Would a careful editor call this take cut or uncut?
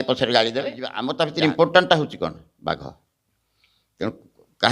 cut